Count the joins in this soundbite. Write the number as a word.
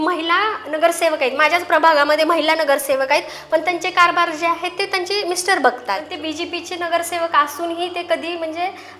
one